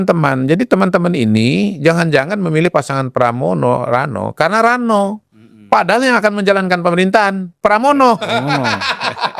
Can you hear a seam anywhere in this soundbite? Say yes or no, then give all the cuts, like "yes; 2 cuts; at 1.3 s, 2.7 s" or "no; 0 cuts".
no; 0 cuts